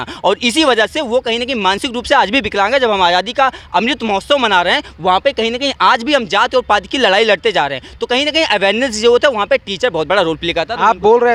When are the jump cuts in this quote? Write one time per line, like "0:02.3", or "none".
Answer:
none